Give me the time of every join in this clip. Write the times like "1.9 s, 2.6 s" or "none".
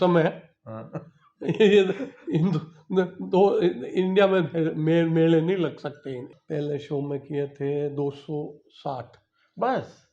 6.3 s